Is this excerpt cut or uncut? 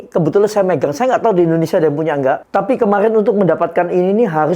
cut